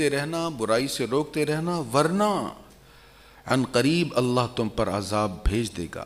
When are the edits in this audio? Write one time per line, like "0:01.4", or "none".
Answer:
none